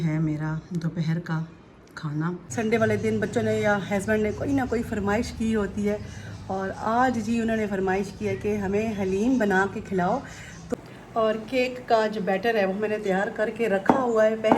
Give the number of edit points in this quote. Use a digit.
2